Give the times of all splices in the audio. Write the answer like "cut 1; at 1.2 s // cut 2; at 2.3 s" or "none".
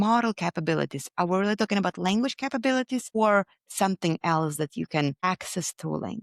cut 1; at 3.1 s // cut 2; at 5.2 s